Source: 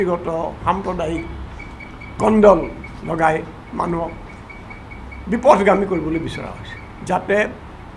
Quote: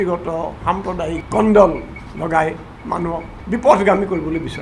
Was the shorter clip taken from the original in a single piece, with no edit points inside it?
no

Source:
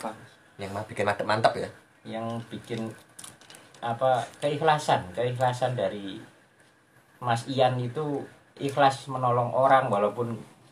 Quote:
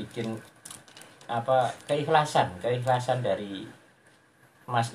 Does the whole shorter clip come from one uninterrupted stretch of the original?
yes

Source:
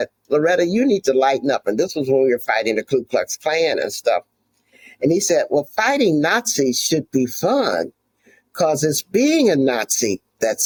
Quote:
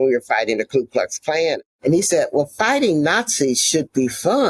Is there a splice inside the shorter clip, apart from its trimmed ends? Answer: yes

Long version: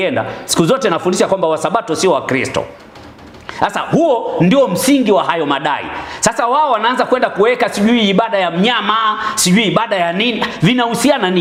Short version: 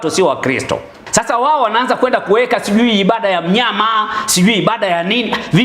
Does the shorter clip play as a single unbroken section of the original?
no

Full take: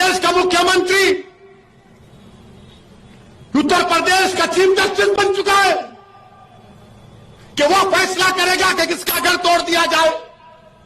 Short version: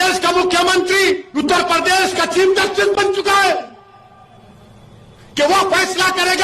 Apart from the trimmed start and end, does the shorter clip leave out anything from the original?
yes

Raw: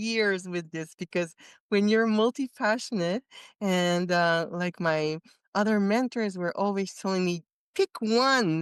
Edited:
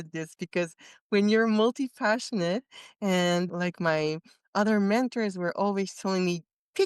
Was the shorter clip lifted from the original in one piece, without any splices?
no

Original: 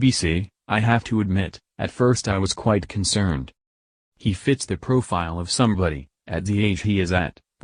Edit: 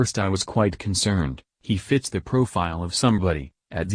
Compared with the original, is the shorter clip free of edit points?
no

